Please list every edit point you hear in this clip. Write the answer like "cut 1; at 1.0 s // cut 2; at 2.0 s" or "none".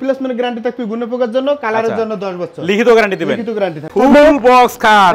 cut 1; at 3.9 s

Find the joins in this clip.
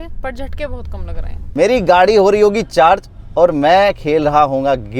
cut 1; at 1.5 s

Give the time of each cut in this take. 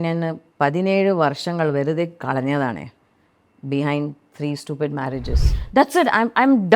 cut 1; at 5.5 s

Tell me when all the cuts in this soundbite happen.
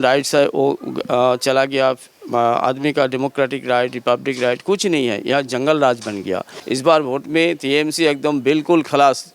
cut 1; at 6.5 s

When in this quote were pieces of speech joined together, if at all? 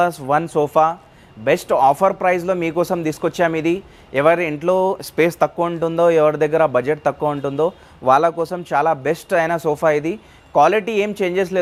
none

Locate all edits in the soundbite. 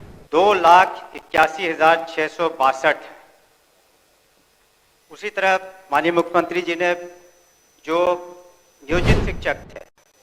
none

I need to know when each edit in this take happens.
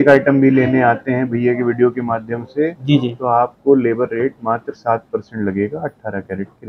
none

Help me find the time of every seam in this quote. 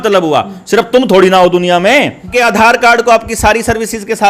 cut 1; at 2.3 s

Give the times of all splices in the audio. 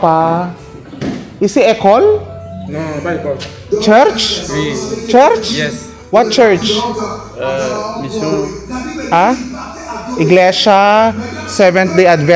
none

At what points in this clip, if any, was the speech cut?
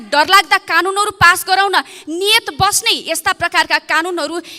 none

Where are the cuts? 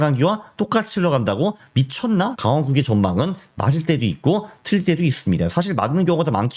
cut 1; at 2.3 s

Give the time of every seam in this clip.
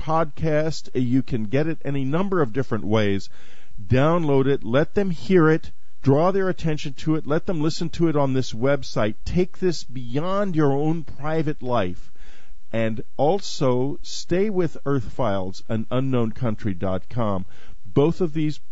none

